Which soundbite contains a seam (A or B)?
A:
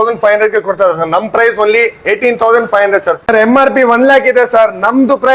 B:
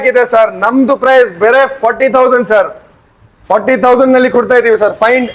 A